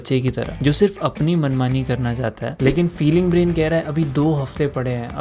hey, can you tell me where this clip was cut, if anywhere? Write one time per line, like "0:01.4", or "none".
0:02.5